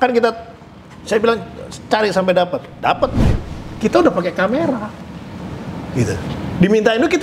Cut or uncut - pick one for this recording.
cut